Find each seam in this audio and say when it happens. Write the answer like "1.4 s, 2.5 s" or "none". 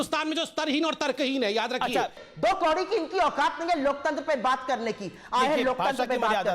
2.2 s